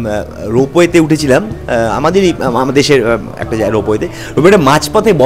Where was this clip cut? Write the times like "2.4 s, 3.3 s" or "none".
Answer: none